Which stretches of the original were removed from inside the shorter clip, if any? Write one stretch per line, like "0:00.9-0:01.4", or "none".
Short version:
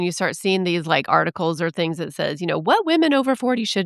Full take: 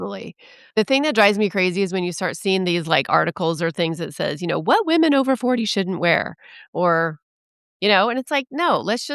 none